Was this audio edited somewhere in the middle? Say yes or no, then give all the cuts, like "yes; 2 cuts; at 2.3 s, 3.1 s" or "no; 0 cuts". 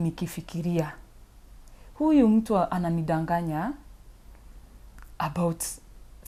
no; 0 cuts